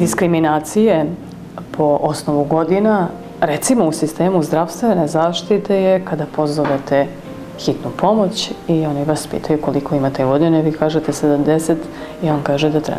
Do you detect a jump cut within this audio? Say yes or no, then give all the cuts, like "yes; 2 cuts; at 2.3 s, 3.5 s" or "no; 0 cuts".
no; 0 cuts